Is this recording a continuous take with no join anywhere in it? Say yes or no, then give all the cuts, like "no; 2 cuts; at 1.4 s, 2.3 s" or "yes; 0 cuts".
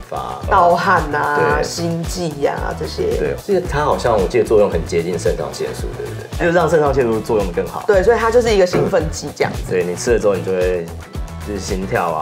yes; 0 cuts